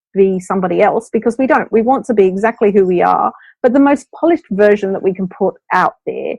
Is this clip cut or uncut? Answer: uncut